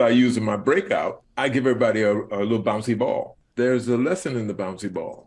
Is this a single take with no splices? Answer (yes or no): no